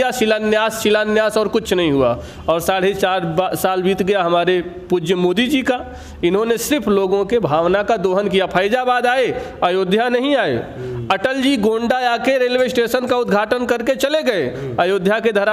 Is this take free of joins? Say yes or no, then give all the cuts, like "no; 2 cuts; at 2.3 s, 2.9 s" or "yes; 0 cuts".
yes; 0 cuts